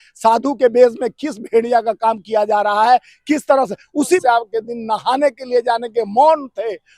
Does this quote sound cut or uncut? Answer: cut